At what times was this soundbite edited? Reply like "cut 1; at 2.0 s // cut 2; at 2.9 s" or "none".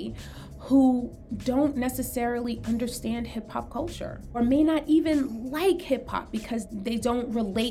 cut 1; at 4.4 s // cut 2; at 6.7 s